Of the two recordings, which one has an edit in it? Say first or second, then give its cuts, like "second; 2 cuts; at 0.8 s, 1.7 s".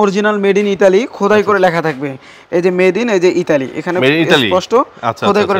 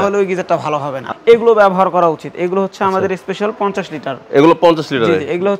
second; 1 cut; at 1.0 s